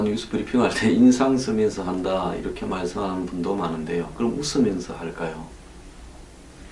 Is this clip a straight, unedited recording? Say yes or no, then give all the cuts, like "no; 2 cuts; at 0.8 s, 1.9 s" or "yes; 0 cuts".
yes; 0 cuts